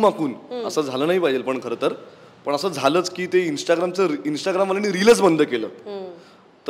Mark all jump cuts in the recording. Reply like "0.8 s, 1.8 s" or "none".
none